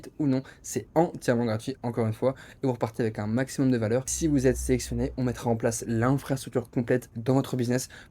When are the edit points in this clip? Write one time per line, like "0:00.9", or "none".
0:04.1